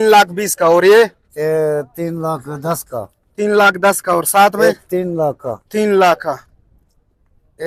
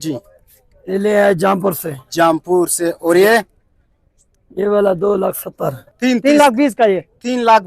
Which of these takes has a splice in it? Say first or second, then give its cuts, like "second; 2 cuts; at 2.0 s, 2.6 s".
second; 1 cut; at 5.8 s